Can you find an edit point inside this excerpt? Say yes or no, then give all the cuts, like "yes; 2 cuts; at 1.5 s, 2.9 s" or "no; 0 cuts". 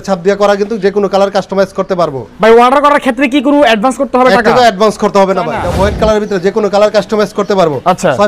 yes; 2 cuts; at 2.2 s, 5.7 s